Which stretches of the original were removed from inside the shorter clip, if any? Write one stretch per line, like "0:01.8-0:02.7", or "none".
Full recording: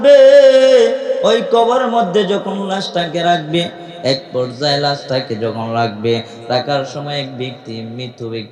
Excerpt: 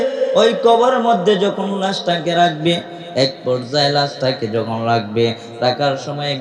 none